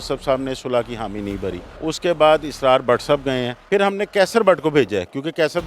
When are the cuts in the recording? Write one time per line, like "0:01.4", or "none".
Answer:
0:01.7
0:03.5

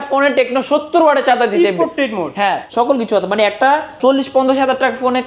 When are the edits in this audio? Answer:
0:02.6
0:04.0

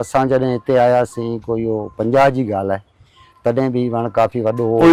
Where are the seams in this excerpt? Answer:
none

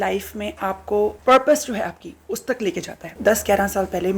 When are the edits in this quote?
0:01.2
0:03.2

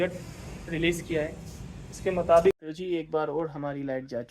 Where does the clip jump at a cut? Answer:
0:02.6

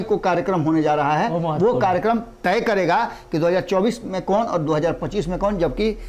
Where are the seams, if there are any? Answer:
none

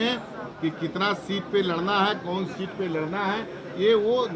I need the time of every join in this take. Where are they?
none

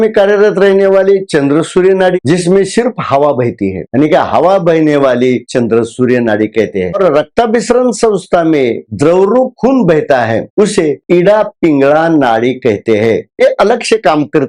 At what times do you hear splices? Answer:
0:02.1
0:05.4
0:07.0
0:08.8

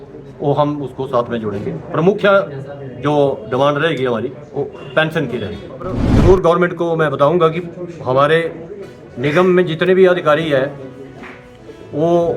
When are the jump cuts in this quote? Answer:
0:06.0

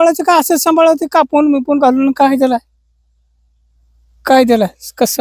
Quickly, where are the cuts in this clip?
none

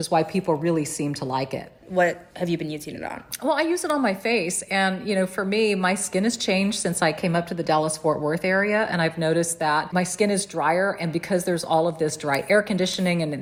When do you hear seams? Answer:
none

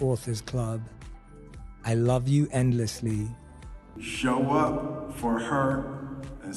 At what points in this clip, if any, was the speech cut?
0:03.9

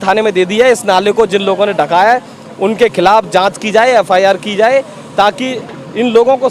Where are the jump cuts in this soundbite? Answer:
none

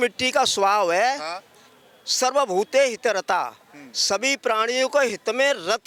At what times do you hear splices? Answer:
none

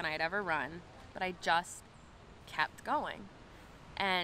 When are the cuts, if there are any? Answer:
0:01.0

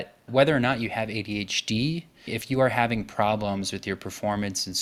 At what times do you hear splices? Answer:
none

